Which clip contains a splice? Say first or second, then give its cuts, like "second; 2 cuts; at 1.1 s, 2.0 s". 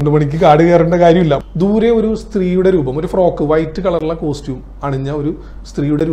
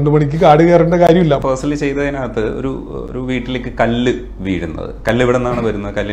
first; 1 cut; at 1.4 s